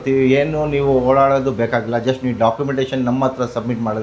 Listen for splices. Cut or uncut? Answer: uncut